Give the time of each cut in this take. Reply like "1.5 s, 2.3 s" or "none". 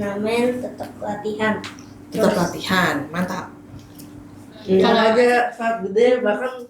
5.1 s